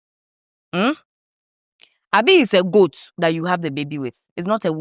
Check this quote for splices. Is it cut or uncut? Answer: uncut